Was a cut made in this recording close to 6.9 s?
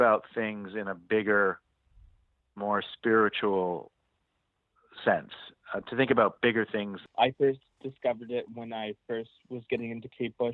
yes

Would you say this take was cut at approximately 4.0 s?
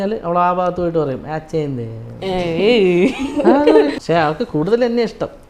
yes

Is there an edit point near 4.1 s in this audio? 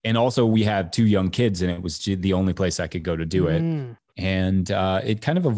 yes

